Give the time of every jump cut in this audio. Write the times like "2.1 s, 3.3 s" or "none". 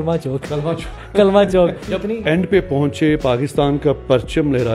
1.9 s